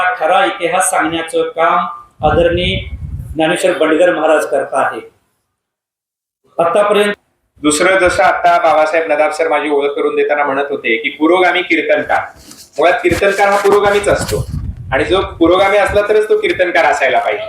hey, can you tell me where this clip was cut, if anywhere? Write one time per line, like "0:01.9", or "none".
0:07.1